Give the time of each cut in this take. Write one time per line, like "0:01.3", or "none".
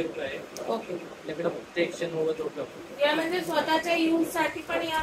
none